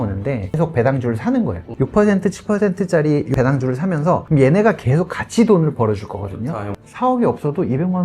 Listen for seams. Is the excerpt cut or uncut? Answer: cut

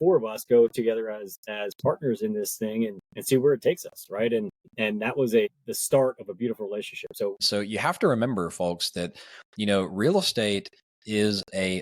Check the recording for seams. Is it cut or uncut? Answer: cut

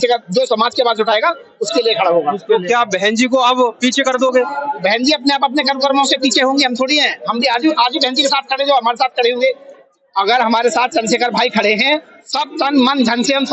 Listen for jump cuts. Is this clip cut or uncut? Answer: uncut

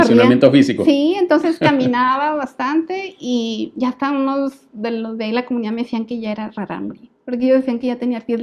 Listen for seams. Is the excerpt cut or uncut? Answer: uncut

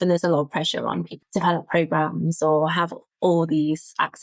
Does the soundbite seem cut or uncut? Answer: cut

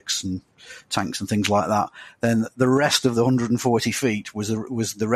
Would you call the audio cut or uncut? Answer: uncut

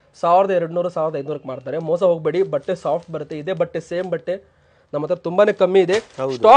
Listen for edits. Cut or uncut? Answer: uncut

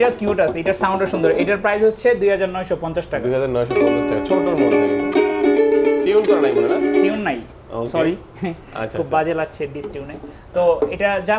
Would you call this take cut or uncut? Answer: uncut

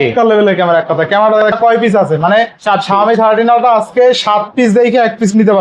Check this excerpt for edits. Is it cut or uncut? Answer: cut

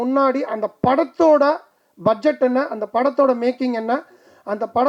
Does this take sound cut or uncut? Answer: uncut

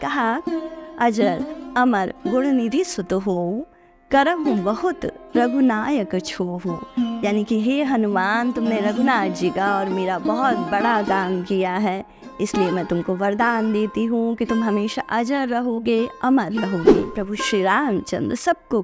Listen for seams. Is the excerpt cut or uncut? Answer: cut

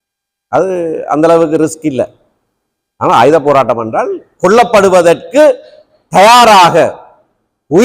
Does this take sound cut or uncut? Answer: uncut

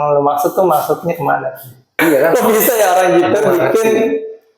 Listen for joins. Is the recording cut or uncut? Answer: cut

